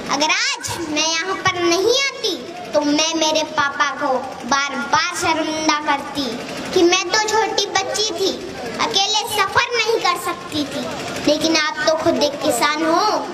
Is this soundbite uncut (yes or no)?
yes